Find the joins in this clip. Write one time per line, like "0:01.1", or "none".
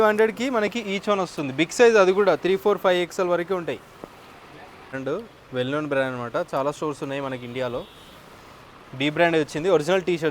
0:05.0